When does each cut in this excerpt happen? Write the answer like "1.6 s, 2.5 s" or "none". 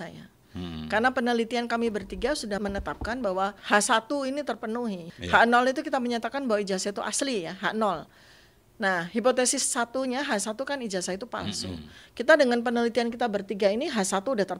2.6 s, 3.6 s, 5.1 s